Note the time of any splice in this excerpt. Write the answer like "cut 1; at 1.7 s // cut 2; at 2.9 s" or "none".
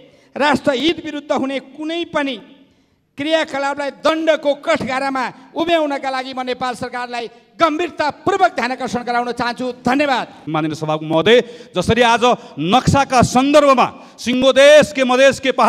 cut 1; at 10.4 s